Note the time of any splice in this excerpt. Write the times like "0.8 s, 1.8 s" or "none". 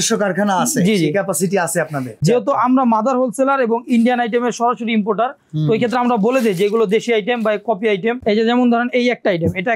2.2 s, 8.2 s